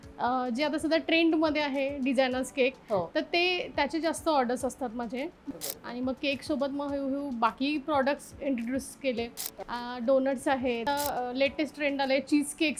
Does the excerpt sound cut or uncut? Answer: cut